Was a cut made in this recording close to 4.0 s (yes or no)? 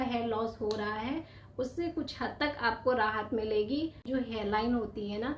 yes